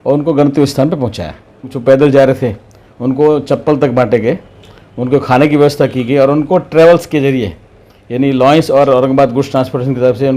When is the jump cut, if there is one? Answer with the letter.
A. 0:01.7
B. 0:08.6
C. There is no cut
A